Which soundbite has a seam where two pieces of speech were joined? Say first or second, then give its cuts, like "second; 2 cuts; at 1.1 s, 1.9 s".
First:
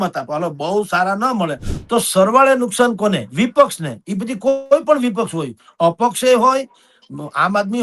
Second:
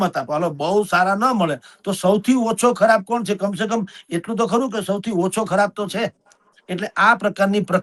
first; 1 cut; at 1.7 s